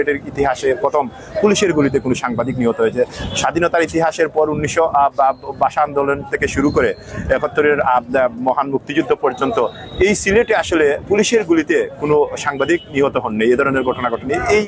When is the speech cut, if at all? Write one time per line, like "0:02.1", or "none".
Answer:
none